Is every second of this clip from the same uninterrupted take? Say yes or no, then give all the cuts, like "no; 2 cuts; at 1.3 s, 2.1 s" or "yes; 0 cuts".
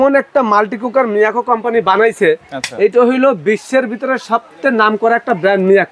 yes; 0 cuts